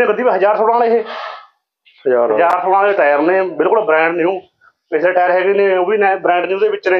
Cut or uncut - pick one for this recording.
uncut